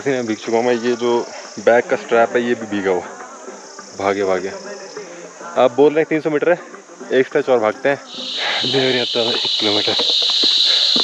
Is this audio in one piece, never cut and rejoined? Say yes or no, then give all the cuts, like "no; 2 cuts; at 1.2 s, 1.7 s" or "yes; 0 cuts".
yes; 0 cuts